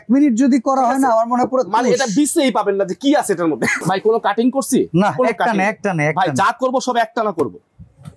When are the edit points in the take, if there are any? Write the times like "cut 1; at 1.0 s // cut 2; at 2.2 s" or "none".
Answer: cut 1; at 3.8 s